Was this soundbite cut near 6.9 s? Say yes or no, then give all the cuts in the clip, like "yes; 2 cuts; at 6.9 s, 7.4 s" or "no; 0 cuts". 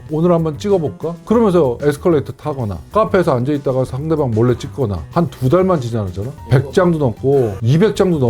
no; 2 cuts; at 2.9 s, 5.0 s